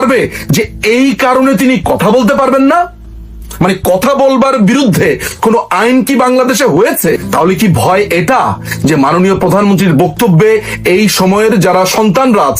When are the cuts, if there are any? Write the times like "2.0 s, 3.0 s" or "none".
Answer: 7.2 s